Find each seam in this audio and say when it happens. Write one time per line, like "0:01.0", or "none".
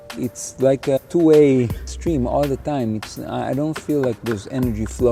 0:01.0
0:01.9